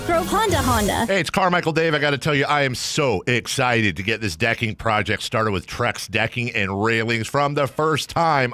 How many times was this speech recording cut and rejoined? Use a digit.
1